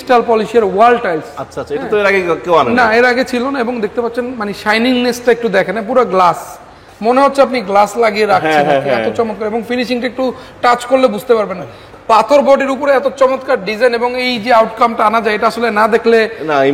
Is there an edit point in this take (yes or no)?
no